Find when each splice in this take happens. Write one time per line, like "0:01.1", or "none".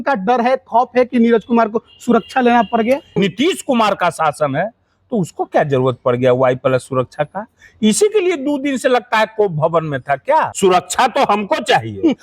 0:03.1
0:10.5